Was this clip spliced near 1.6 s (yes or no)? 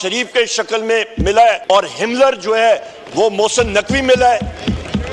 yes